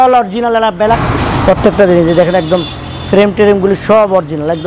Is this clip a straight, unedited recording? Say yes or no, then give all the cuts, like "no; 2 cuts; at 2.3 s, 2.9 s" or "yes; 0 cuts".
no; 1 cut; at 1.0 s